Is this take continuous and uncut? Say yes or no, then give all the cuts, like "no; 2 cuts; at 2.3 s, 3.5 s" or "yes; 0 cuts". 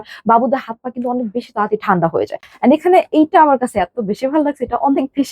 no; 1 cut; at 2.5 s